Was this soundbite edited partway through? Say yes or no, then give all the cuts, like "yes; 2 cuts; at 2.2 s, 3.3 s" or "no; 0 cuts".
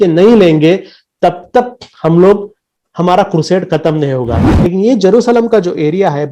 yes; 1 cut; at 4.4 s